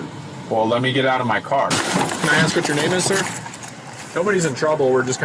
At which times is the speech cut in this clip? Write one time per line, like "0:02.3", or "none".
0:01.7